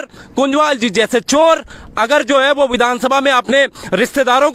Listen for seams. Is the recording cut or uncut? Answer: uncut